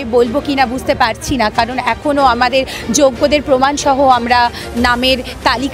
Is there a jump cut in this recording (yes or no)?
no